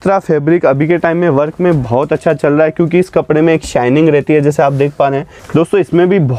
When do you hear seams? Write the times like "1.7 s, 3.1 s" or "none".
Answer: 5.4 s